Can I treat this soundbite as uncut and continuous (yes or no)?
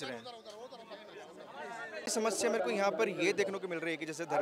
no